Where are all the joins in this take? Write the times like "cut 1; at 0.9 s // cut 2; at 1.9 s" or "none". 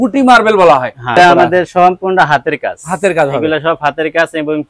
cut 1; at 1.2 s